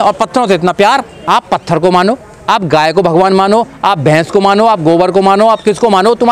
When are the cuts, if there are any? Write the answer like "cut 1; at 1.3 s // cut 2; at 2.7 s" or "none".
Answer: cut 1; at 1.1 s